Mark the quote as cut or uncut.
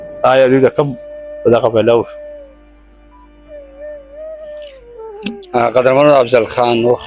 uncut